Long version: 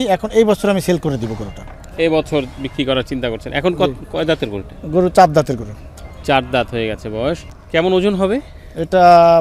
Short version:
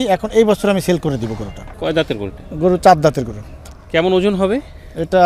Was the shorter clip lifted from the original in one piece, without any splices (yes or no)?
no